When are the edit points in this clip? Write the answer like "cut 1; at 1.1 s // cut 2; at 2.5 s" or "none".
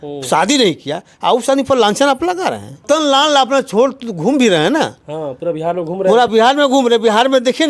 cut 1; at 2.8 s